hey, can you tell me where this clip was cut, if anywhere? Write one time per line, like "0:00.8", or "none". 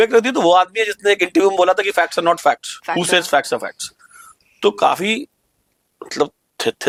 none